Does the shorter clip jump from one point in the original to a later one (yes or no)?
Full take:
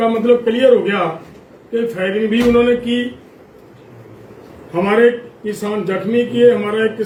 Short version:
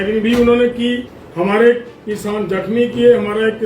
yes